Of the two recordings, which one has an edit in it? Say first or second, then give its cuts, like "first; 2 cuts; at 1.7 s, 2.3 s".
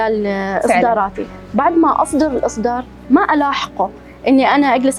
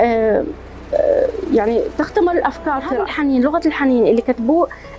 second; 1 cut; at 3.0 s